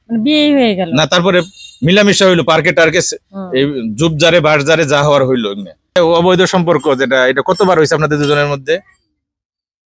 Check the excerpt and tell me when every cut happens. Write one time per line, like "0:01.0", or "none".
0:05.9